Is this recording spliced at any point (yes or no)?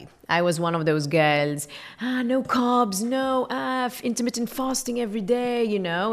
no